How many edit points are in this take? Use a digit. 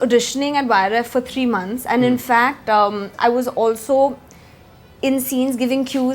1